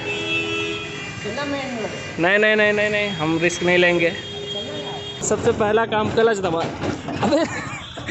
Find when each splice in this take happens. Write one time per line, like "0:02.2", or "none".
0:05.2